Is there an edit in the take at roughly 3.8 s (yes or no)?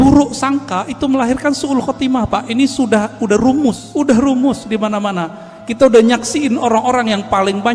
yes